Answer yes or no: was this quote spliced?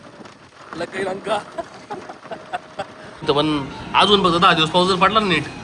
yes